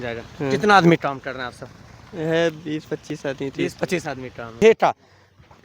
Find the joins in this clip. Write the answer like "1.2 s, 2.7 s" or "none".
4.6 s